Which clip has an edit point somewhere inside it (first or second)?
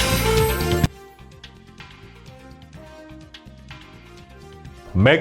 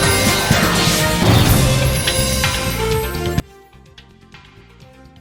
first